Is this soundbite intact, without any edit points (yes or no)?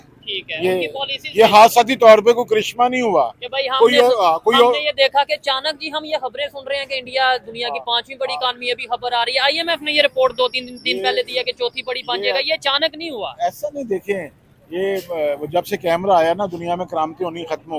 yes